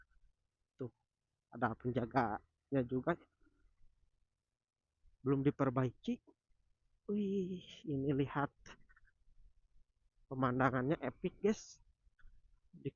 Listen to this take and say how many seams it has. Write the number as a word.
zero